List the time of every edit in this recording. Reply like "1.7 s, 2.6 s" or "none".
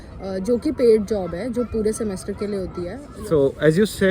3.1 s